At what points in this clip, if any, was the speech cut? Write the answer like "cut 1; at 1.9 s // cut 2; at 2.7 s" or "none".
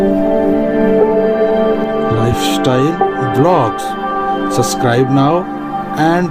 none